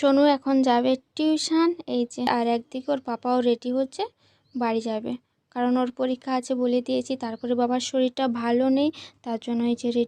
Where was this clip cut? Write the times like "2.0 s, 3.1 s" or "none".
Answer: 2.3 s